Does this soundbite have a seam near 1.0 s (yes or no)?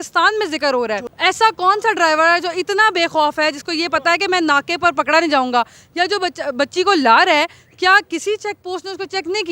yes